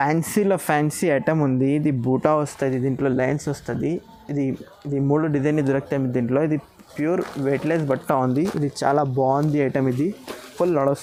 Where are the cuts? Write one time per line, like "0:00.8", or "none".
none